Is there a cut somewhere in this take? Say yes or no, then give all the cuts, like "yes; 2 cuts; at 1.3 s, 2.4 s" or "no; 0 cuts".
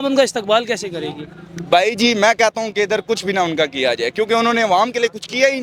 no; 0 cuts